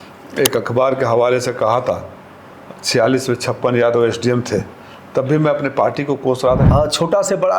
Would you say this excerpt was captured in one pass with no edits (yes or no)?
no